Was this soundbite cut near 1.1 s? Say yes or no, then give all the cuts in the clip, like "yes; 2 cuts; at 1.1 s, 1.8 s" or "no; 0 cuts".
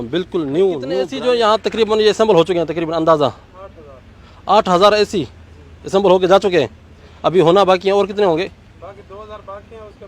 yes; 1 cut; at 1.1 s